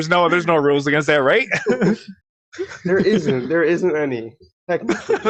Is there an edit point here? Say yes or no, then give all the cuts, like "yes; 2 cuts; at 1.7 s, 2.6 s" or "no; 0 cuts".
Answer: no; 0 cuts